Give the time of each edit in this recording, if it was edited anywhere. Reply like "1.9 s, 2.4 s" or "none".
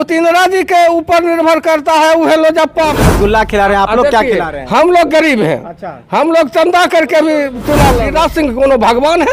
3.0 s, 8.0 s